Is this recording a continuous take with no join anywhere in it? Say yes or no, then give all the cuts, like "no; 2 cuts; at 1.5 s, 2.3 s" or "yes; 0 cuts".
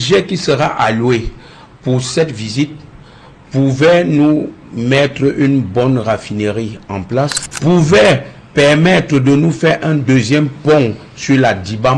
no; 1 cut; at 7.5 s